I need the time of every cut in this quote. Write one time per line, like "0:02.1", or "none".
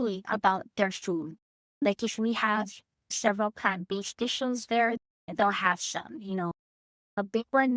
none